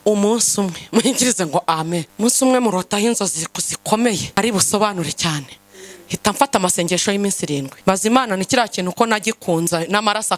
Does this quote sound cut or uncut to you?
cut